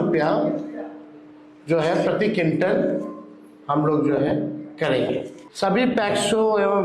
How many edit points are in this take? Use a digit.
1